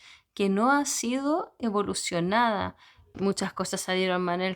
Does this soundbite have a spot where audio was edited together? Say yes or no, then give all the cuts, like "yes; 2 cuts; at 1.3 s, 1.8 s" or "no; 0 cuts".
yes; 1 cut; at 3.1 s